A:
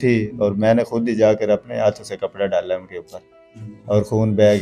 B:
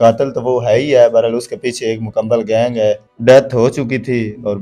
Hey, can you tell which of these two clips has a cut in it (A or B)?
B